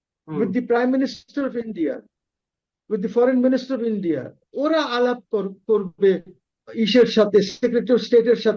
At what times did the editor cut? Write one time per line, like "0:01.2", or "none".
0:06.6